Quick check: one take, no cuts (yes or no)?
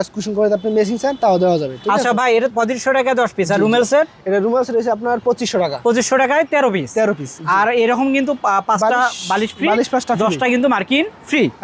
yes